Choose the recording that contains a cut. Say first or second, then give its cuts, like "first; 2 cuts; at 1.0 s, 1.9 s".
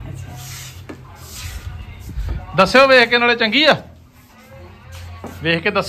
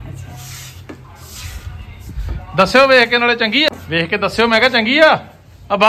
second; 1 cut; at 3.7 s